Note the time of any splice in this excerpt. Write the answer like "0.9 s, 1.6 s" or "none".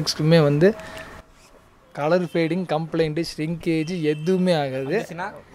none